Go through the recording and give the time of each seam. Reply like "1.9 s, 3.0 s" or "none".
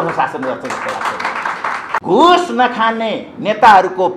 1.9 s